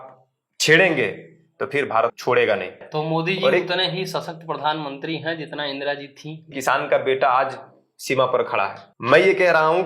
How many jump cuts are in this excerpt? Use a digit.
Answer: 4